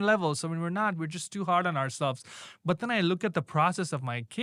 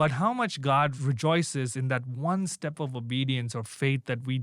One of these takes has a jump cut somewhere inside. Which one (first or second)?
second